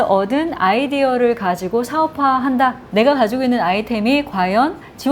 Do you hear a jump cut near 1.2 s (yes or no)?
no